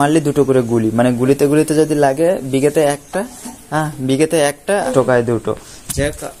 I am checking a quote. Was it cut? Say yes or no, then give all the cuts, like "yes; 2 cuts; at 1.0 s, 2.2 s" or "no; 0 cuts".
yes; 1 cut; at 4.9 s